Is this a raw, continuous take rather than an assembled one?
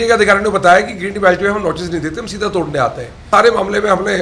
no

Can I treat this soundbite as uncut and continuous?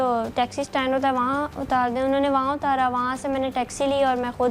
yes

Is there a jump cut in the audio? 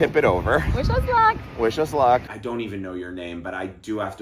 yes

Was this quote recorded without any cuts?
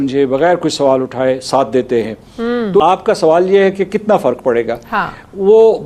no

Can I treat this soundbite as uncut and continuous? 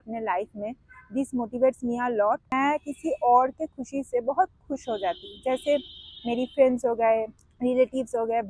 no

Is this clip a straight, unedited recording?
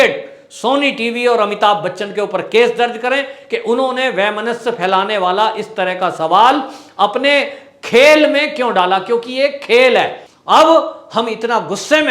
no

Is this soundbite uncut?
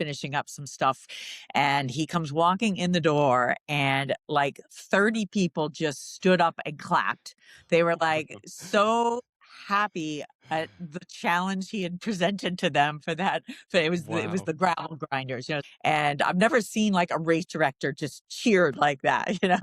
no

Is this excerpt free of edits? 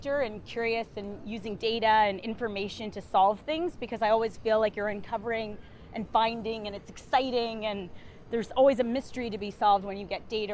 yes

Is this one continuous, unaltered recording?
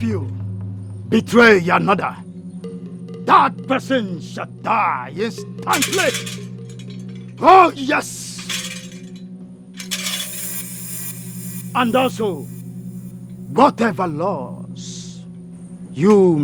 yes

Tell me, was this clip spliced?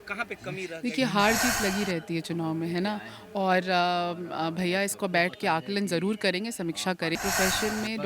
yes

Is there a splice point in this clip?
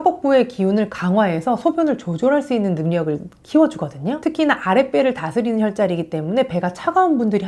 no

